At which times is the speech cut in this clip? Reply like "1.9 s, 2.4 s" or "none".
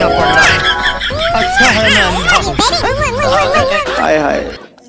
none